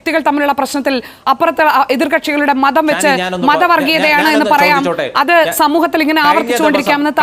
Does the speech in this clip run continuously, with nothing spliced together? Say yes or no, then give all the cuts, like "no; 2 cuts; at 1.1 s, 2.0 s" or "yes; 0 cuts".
yes; 0 cuts